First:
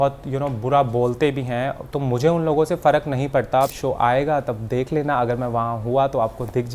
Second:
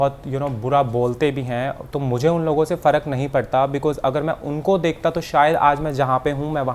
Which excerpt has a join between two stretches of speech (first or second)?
first